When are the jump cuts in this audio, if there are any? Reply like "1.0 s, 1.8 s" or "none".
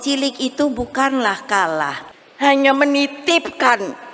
2.0 s